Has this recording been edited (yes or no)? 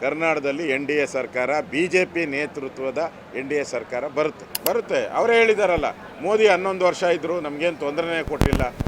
yes